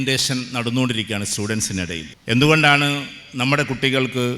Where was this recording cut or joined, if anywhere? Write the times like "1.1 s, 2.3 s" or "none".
2.1 s